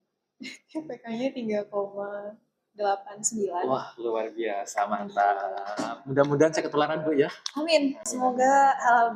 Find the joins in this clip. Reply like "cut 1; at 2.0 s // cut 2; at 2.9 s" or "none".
none